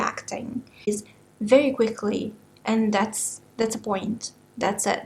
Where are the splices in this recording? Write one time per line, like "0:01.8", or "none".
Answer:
0:01.0